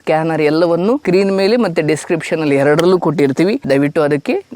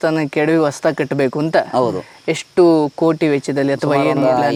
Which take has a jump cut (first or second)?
first